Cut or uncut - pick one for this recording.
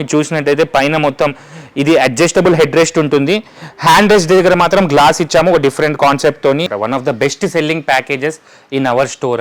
cut